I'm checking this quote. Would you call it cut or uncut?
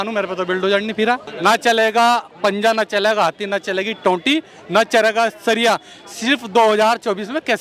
cut